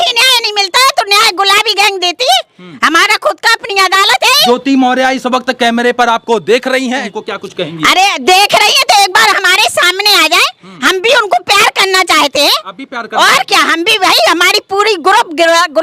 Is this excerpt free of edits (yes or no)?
no